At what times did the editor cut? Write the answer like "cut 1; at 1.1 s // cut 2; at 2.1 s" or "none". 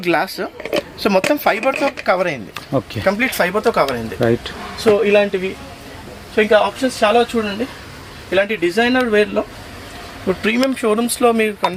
none